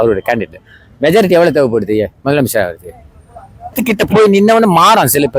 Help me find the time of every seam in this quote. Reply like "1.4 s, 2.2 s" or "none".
3.8 s